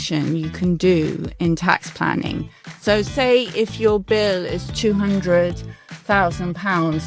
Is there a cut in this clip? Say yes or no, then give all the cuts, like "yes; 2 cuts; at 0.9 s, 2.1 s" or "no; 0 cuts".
no; 0 cuts